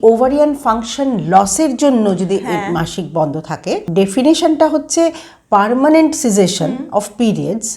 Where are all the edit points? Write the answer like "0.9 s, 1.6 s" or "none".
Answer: 3.9 s